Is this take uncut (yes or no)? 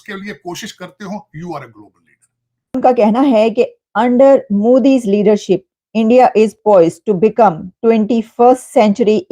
no